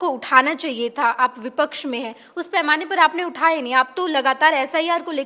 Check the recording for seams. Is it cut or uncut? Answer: uncut